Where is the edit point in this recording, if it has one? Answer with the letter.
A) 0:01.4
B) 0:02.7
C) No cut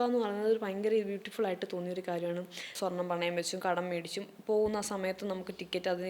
B